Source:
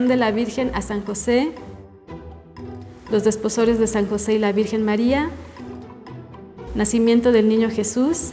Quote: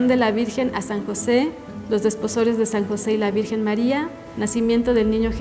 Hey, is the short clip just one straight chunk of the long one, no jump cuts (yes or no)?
no